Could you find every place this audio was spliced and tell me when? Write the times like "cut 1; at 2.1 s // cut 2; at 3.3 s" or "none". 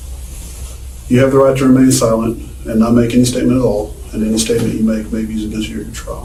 none